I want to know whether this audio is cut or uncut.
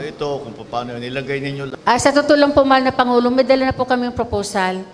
cut